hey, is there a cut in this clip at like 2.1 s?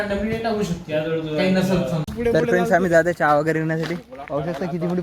yes; 1 cut; at 2.1 s

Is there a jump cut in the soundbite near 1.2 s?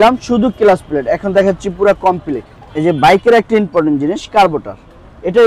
no; 1 cut; at 2.6 s

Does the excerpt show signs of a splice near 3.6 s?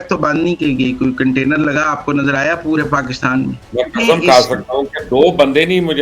yes; 1 cut; at 3.6 s

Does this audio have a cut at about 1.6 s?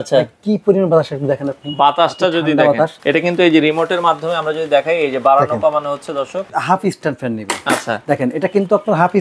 no; 2 cuts; at 3.0 s, 6.5 s

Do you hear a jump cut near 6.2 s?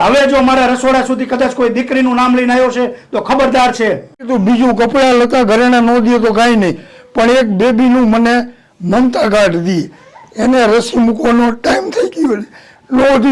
no; 1 cut; at 4.3 s

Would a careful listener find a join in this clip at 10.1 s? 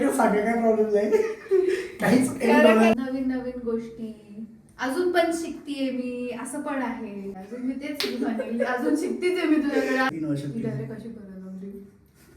yes; 3 cuts; at 2.9 s, 7.4 s, 10.1 s

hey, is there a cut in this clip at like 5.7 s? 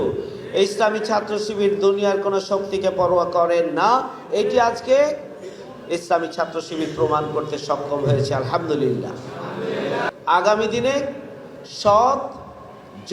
no; 1 cut; at 10.1 s

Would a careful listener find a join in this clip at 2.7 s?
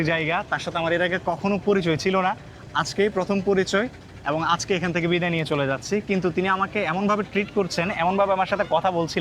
no; 0 cuts

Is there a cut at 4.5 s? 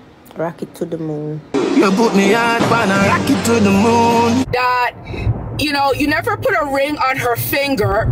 yes; 1 cut; at 4.5 s

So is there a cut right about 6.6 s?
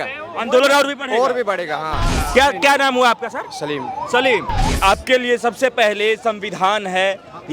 no; 2 cuts; at 2.1 s, 4.7 s

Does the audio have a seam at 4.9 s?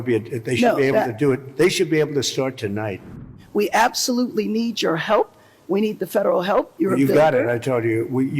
no; 1 cut; at 3.2 s

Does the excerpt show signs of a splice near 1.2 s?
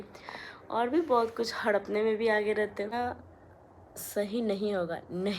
no; 1 cut; at 2.9 s

